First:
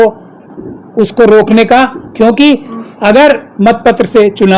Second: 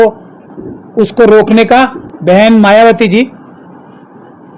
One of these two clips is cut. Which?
second; 1 cut; at 2.0 s

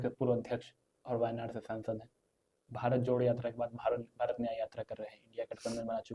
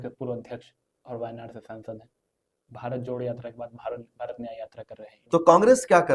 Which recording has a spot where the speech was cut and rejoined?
second; 1 cut; at 5.2 s

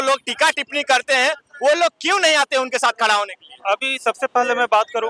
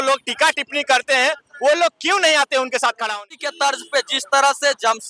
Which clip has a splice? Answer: second; 1 cut; at 3.5 s

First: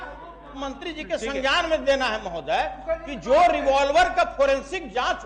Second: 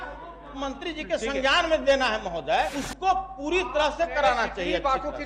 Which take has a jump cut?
second; 1 cut; at 2.8 s

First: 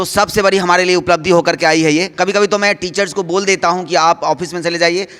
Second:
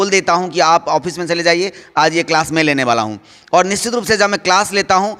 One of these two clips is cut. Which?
first; 1 cut; at 2.1 s

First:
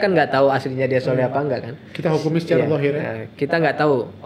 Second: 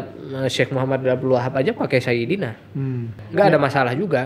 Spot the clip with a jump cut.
second; 1 cut; at 3.1 s

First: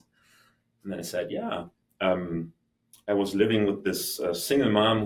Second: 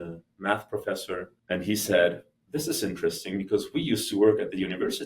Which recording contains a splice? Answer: second; 1 cut; at 1.3 s

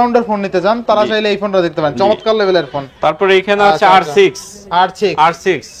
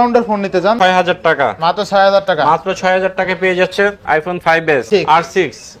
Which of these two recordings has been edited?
second; 2 cuts; at 0.8 s, 4.8 s

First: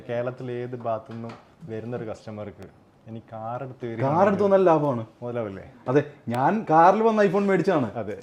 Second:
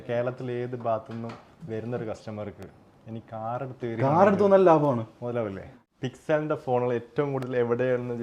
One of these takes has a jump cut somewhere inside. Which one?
second; 1 cut; at 5.7 s

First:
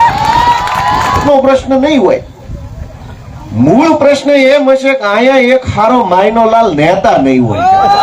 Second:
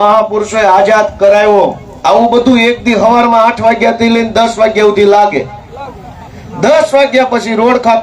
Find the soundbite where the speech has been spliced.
first; 1 cut; at 1.2 s

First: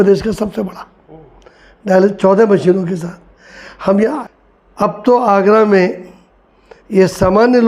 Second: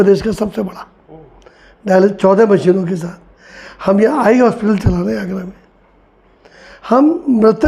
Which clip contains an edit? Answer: first; 1 cut; at 4.2 s

